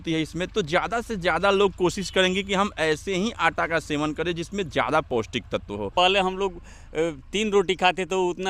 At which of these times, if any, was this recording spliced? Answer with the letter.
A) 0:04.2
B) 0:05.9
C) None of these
B